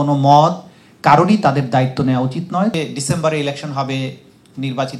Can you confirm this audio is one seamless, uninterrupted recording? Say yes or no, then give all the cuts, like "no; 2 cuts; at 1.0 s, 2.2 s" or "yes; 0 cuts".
no; 1 cut; at 2.7 s